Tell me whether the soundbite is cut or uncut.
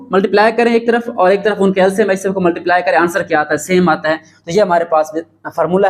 uncut